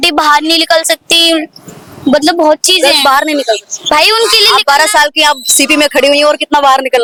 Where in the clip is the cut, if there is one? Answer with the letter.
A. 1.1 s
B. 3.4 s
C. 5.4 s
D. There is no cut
D